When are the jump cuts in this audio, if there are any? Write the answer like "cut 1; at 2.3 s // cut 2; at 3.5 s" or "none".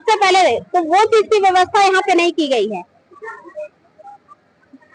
none